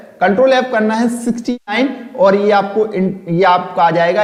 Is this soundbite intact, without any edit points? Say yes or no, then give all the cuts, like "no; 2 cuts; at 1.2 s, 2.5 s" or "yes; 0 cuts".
yes; 0 cuts